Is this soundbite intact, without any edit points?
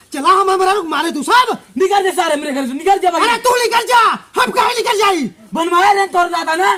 yes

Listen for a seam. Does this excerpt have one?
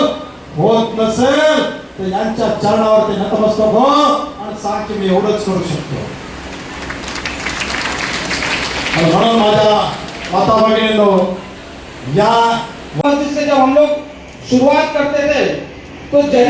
no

